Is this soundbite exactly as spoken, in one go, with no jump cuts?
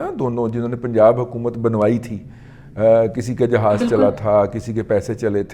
yes; 0 cuts

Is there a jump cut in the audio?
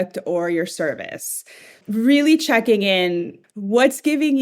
yes; 2 cuts; at 1.8 s, 3.3 s

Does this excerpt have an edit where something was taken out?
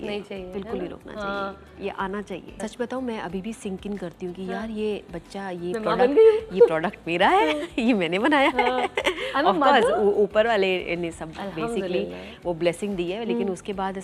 no; 0 cuts

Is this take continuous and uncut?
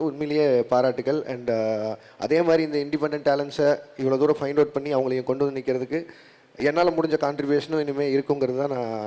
yes; 0 cuts

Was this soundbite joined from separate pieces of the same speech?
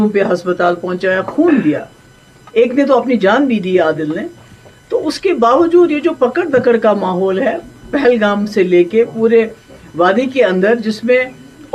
no; 0 cuts

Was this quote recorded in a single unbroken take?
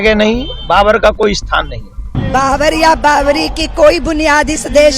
no; 1 cut; at 2.1 s

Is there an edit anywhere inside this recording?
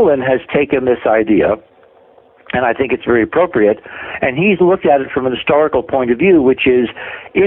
no; 0 cuts

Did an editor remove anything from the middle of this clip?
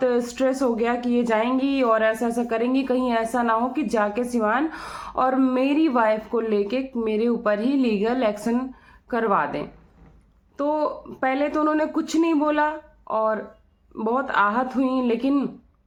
no; 0 cuts

